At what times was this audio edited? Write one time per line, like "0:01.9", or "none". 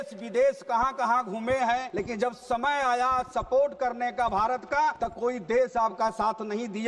0:01.9
0:05.0